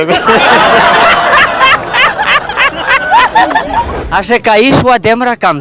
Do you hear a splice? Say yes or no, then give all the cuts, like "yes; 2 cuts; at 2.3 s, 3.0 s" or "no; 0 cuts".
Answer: yes; 1 cut; at 3.9 s